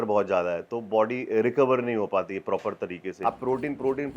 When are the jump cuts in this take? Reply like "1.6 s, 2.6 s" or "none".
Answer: 3.1 s